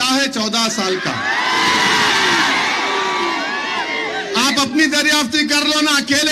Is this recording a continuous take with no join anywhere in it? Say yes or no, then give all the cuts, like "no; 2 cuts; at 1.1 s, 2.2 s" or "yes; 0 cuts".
yes; 0 cuts